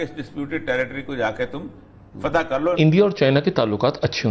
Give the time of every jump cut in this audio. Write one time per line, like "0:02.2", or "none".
0:02.8